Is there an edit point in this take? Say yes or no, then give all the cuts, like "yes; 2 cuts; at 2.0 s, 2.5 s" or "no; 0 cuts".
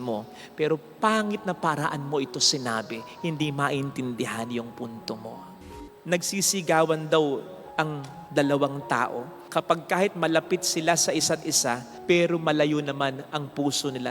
yes; 1 cut; at 5.5 s